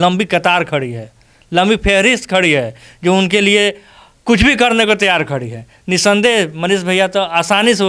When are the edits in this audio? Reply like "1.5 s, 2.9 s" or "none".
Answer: none

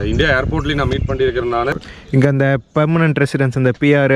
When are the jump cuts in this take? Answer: 1.7 s

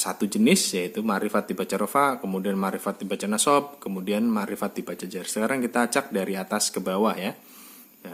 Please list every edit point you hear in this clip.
none

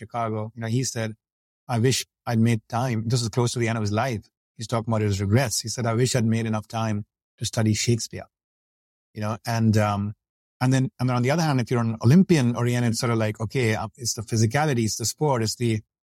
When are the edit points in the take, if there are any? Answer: none

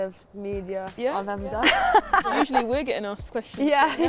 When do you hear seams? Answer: 0.9 s, 2.3 s

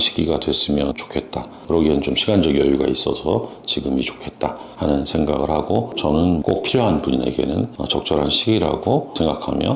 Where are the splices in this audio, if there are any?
6.4 s

